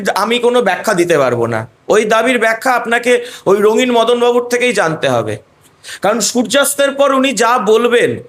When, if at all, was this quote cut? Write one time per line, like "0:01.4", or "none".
none